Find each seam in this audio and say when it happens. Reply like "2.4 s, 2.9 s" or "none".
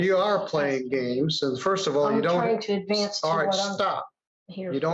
none

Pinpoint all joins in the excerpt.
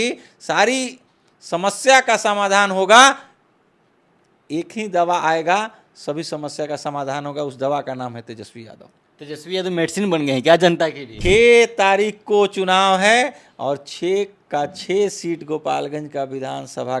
11.1 s

